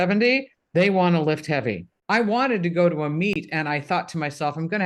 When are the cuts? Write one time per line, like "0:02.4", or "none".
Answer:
0:02.1

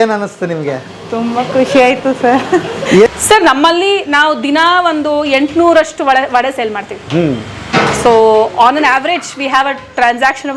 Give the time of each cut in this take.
0:03.1

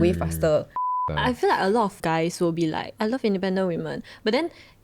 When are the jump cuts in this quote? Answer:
0:01.0
0:02.0
0:02.9

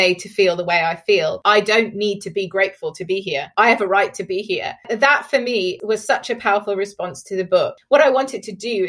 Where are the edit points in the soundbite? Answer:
0:01.4
0:03.4
0:04.9
0:05.8
0:07.7

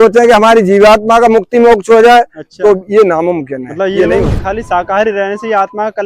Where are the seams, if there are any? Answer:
0:04.4

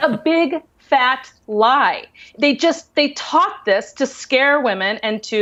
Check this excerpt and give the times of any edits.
none

